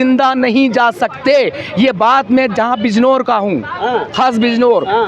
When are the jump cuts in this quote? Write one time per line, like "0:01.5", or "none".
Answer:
none